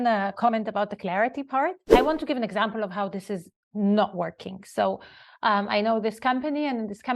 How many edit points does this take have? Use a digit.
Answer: 1